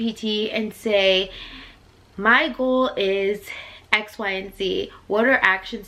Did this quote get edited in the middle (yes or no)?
no